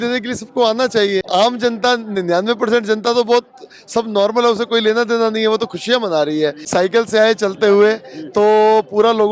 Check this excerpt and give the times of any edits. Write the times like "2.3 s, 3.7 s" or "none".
1.3 s, 6.6 s